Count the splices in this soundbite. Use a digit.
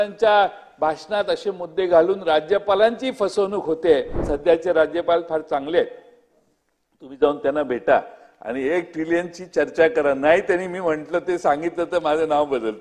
1